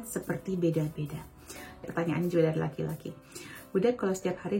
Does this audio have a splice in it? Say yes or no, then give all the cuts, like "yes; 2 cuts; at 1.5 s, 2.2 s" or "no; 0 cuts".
yes; 1 cut; at 1.8 s